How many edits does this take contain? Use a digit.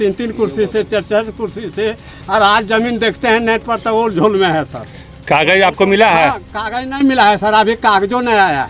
0